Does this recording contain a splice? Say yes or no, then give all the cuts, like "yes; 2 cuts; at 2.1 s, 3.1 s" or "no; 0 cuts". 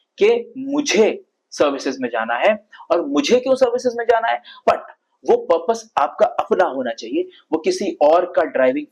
yes; 1 cut; at 4.5 s